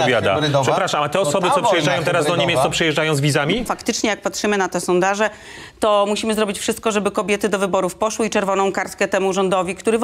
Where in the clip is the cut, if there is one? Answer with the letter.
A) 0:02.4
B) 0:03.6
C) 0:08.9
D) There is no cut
B